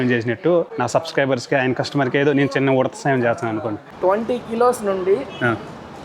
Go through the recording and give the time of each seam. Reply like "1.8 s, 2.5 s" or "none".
3.9 s